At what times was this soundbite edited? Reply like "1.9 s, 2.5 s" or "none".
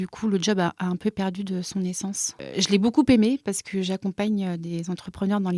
2.3 s